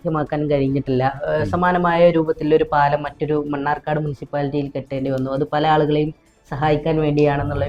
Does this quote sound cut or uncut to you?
uncut